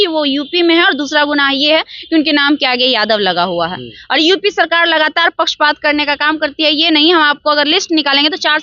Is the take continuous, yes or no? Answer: yes